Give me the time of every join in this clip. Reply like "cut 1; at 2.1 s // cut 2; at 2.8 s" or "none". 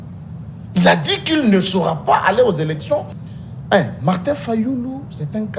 cut 1; at 3.2 s